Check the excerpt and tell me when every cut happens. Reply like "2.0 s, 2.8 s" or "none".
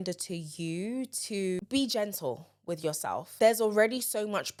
none

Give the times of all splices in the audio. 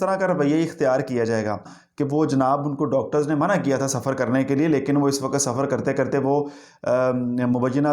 1.7 s

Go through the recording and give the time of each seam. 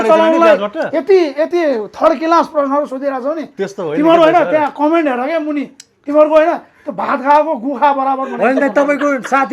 none

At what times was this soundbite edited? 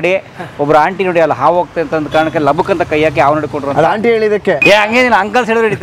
4.6 s

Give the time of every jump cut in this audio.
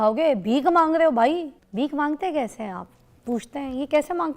1.6 s

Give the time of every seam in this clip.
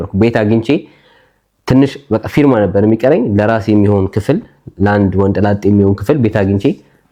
none

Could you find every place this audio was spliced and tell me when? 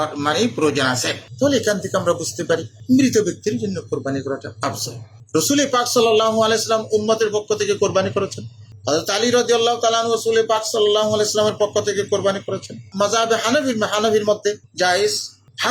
12.9 s

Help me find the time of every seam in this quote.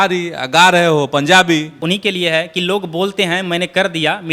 1.8 s

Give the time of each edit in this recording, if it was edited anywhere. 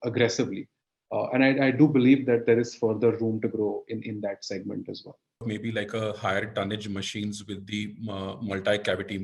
5.4 s

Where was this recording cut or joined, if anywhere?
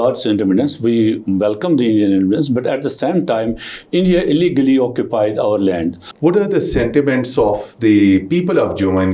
6.1 s

